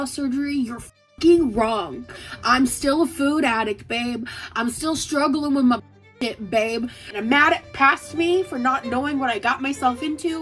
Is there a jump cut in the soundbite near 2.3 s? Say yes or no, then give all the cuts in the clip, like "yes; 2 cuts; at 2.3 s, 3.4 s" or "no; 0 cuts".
no; 1 cut; at 7.0 s